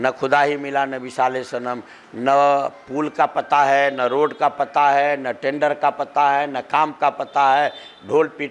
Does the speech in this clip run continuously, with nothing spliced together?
yes; 0 cuts

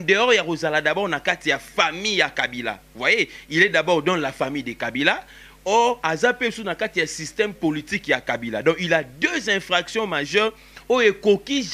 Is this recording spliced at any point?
no; 0 cuts

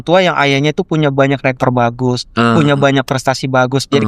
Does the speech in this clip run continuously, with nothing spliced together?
yes; 0 cuts

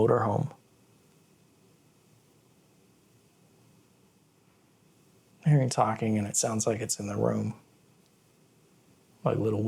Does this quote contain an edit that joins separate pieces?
yes; 1 cut; at 4.9 s

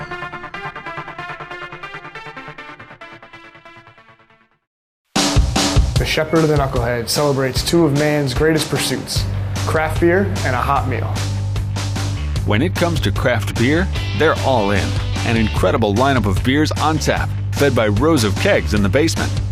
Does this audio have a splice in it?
yes; 1 cut; at 4.9 s

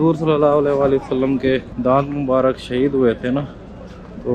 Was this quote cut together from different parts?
yes; 1 cut; at 1.7 s

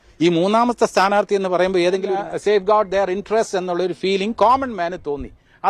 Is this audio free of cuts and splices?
no; 1 cut; at 2.1 s

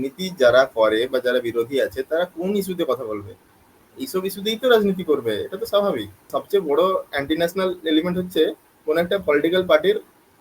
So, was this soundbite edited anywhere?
yes; 1 cut; at 6.3 s

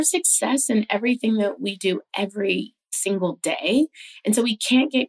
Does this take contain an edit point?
no; 0 cuts

